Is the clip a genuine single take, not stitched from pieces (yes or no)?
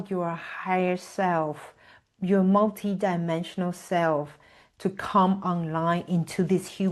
yes